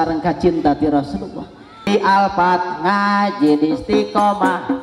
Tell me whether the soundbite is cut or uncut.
cut